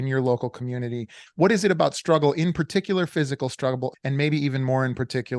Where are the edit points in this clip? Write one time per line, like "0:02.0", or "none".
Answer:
0:01.2
0:04.0